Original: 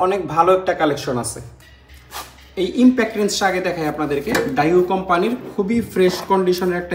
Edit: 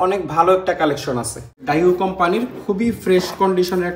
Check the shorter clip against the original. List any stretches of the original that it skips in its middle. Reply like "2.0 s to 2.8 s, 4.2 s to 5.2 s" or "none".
1.6 s to 4.5 s